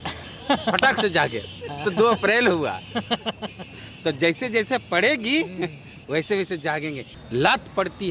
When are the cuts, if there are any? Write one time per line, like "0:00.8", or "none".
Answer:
0:07.1